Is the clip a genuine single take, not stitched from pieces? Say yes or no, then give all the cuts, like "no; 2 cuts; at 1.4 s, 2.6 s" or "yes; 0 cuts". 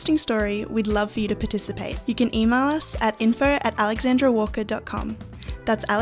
yes; 0 cuts